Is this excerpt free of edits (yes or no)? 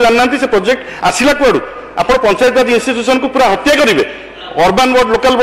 yes